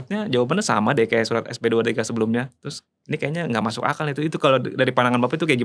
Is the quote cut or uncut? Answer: uncut